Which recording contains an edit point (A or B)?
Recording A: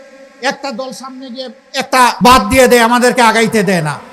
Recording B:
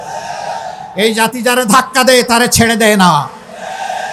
A